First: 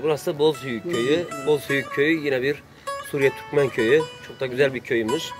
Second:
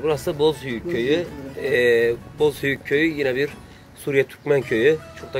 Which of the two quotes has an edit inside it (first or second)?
first